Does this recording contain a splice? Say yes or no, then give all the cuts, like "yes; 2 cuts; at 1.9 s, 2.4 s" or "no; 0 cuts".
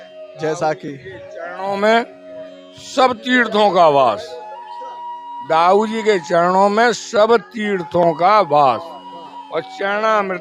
no; 0 cuts